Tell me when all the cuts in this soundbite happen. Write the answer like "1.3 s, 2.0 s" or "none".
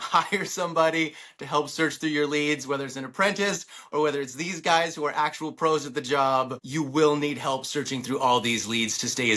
6.6 s

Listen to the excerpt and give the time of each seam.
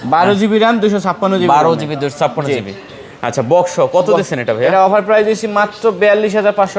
none

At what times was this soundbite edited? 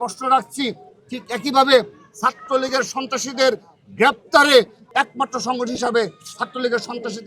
4.8 s

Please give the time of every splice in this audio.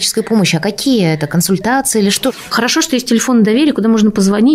2.4 s

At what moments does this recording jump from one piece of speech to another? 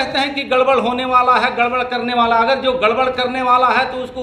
none

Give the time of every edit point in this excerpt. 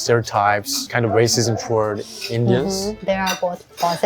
0.9 s, 3.0 s

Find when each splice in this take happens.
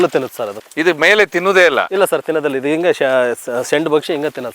none

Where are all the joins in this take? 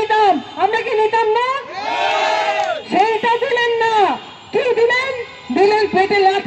none

